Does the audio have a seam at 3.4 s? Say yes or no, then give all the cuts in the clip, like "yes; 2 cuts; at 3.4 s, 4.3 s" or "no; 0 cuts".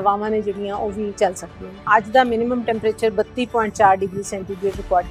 no; 1 cut; at 1.9 s